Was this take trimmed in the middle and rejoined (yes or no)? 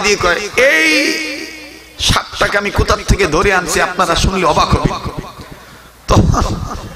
no